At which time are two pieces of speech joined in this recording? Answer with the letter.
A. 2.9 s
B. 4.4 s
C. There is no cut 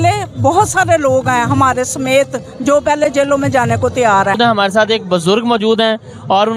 B